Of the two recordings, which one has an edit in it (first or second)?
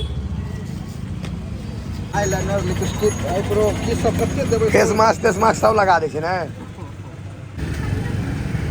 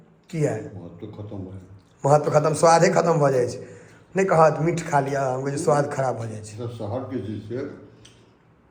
first